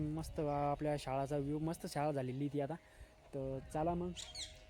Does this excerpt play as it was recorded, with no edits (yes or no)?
yes